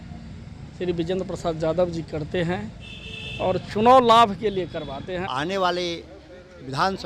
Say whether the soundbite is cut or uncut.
cut